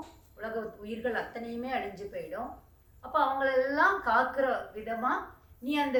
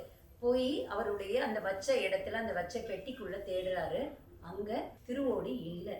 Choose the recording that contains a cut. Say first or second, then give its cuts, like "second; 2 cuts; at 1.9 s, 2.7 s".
second; 1 cut; at 5.0 s